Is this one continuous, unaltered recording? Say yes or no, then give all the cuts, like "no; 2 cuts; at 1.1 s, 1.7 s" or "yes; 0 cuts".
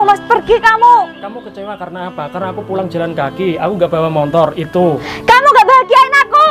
yes; 0 cuts